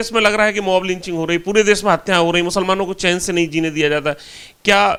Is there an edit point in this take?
no; 0 cuts

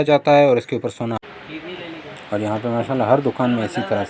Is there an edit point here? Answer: yes; 1 cut; at 1.3 s

